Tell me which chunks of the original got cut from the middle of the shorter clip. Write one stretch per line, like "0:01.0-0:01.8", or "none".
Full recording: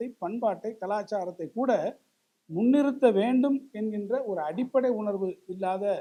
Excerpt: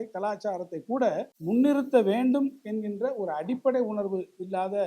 0:02.0-0:02.4